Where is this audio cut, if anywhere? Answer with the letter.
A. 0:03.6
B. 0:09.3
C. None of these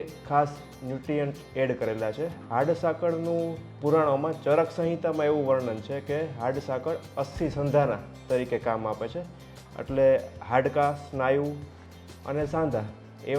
A